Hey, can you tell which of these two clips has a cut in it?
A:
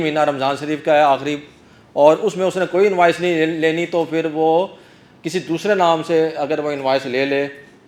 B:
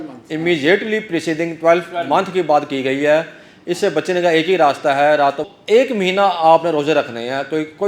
B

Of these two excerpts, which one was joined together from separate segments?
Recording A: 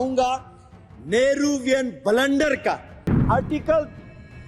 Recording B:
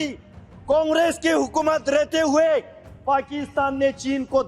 A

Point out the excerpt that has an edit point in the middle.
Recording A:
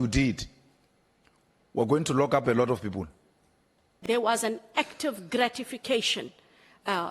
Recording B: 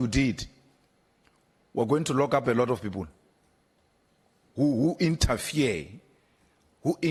A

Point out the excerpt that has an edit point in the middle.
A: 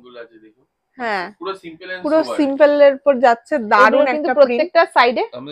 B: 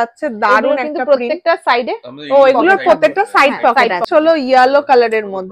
B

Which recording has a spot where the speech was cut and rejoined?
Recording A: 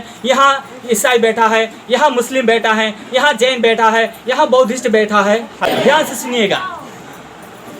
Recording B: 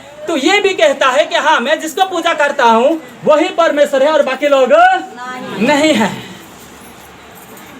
A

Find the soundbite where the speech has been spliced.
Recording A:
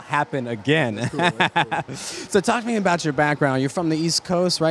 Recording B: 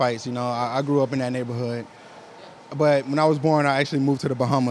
A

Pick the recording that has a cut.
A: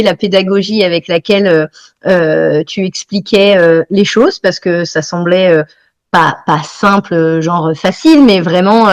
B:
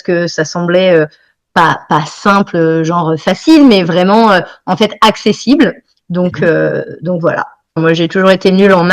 B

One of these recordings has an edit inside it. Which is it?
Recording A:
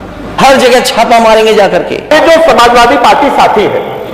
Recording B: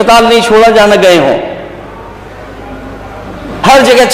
A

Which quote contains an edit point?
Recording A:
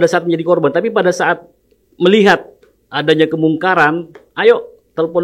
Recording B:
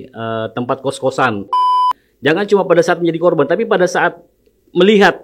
B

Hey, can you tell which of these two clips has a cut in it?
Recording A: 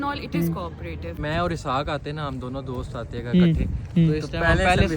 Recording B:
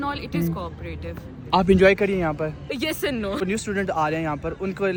A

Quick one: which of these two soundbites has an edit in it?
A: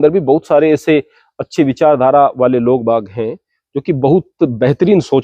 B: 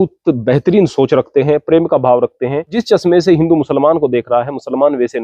B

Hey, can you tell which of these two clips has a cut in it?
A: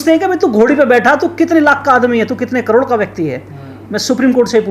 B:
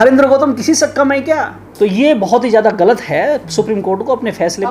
B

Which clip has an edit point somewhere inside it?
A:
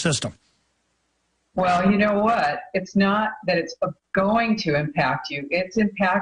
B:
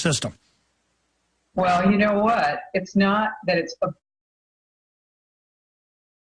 A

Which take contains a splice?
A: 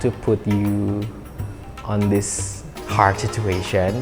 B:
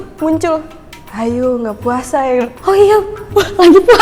B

